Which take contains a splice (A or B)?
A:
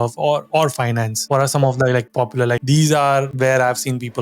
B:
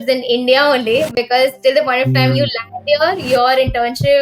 A